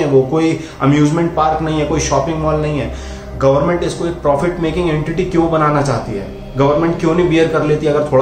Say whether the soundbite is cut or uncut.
uncut